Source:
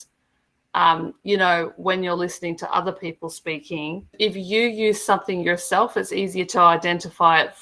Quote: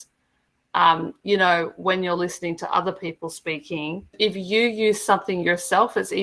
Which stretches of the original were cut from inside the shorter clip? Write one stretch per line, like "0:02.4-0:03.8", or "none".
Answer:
none